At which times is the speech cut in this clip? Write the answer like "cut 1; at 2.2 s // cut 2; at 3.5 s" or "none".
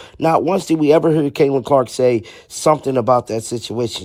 none